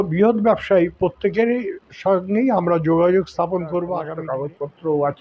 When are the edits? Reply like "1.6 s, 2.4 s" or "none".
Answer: 4.1 s